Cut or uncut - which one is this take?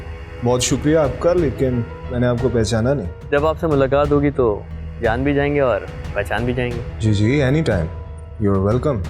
uncut